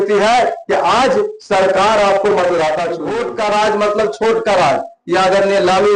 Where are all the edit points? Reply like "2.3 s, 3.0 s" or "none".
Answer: 3.0 s